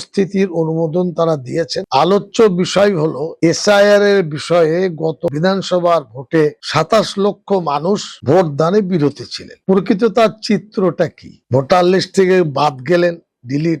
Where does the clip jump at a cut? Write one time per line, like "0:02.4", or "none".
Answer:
0:01.8